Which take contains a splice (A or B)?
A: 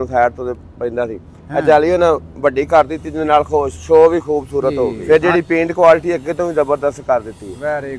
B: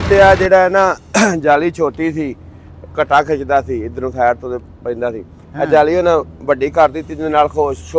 A